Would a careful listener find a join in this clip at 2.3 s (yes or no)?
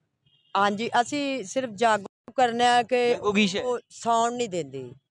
yes